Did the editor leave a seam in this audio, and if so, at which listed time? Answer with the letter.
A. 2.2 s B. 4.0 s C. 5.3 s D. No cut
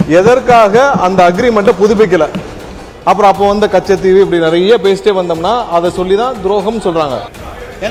D